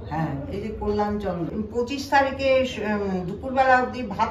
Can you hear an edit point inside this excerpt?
yes; 1 cut; at 1.8 s

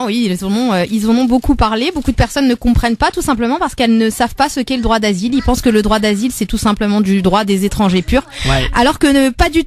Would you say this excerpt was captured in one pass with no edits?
yes; 0 cuts

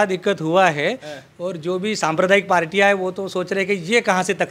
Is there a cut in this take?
no; 0 cuts

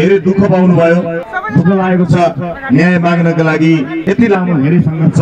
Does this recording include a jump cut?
yes; 2 cuts; at 1.3 s, 4.0 s

